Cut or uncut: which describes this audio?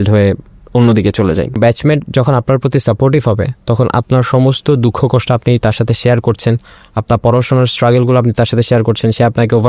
cut